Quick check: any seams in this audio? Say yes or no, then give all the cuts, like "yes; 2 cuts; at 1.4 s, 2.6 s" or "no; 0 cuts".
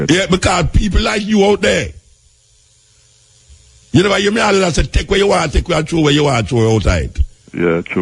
no; 0 cuts